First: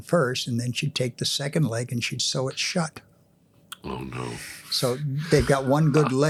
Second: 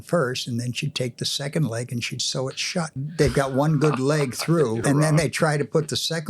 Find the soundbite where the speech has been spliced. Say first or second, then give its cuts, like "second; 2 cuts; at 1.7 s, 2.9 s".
second; 2 cuts; at 3.0 s, 4.8 s